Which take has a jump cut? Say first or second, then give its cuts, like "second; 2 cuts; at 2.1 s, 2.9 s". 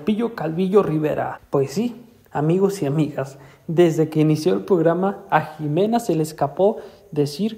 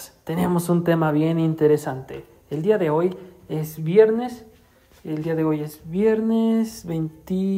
first; 1 cut; at 1.4 s